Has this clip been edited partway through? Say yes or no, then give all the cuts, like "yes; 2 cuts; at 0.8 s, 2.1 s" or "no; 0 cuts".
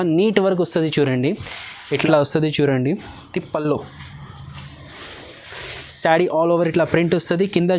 yes; 1 cut; at 1.8 s